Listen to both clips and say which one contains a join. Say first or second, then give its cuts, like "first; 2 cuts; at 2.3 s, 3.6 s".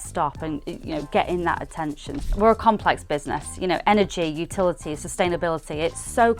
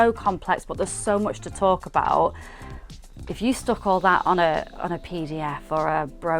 first; 1 cut; at 2.1 s